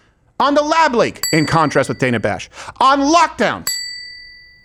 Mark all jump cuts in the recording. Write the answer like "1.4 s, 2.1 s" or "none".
none